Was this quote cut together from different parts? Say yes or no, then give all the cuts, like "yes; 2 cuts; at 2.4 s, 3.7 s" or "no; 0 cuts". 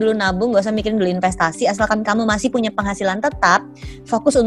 no; 0 cuts